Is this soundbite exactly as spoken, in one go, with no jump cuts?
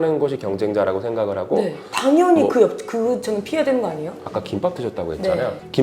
no; 1 cut; at 4.2 s

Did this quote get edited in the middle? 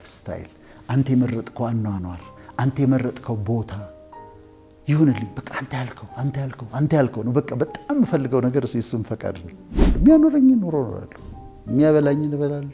yes; 1 cut; at 9.9 s

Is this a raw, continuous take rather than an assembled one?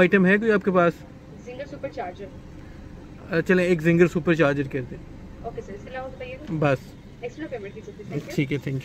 yes; 0 cuts

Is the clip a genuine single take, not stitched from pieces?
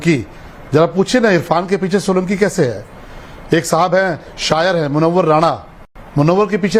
yes; 0 cuts

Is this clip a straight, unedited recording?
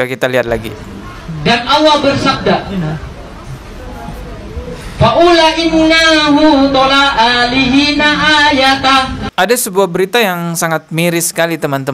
no; 1 cut; at 9.2 s

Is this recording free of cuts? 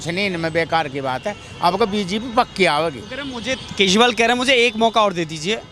yes; 0 cuts

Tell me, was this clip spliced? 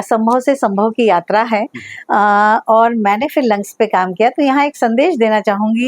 no; 0 cuts

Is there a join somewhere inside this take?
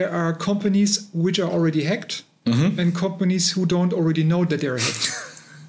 no; 0 cuts

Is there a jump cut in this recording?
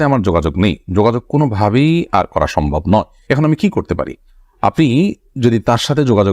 no; 0 cuts

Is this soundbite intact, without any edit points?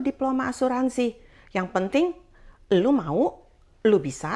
yes; 0 cuts

